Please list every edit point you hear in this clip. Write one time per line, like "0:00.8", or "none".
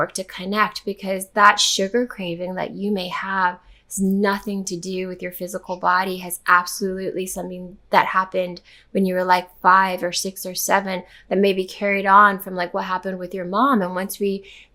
none